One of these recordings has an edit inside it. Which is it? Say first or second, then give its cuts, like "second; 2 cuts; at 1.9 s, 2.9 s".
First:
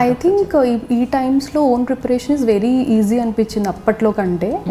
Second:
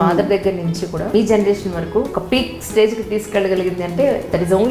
second; 2 cuts; at 1.1 s, 2.1 s